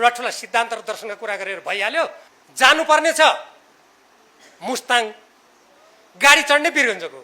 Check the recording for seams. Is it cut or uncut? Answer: cut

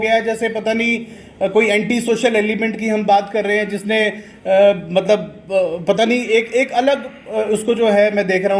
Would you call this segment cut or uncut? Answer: uncut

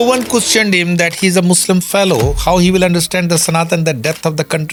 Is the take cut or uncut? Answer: uncut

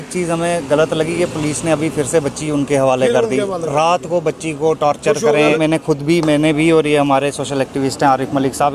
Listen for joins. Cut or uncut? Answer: uncut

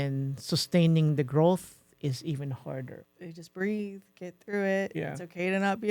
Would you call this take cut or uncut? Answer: cut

